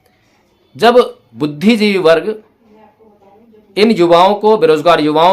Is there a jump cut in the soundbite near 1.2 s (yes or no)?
yes